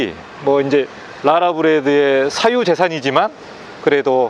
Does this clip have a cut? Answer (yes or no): no